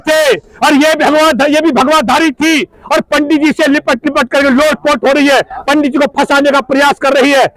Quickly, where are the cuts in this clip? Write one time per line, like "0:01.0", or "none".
none